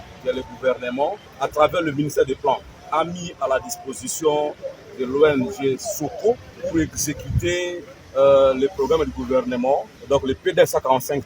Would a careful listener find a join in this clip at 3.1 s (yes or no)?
no